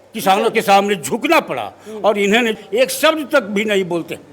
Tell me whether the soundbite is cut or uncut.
cut